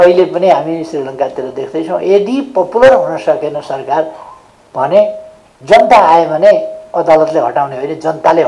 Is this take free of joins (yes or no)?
yes